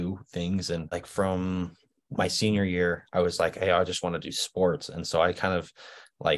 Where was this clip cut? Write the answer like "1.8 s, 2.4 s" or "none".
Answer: 0.9 s